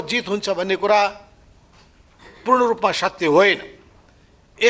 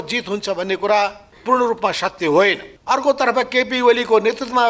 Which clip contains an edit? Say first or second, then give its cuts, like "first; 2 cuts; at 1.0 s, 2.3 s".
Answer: second; 2 cuts; at 1.3 s, 2.7 s